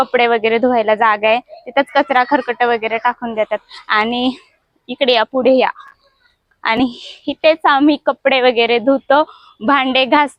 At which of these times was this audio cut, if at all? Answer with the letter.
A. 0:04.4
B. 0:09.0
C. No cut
C